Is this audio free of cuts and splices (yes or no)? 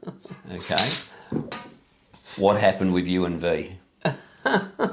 yes